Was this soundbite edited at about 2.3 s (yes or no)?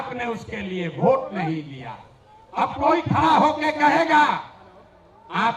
no